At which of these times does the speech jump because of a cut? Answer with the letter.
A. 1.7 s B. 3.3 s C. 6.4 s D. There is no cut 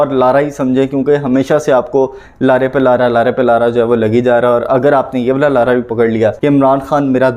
C